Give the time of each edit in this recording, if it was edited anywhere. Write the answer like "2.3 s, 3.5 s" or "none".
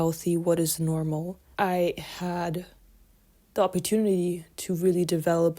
1.3 s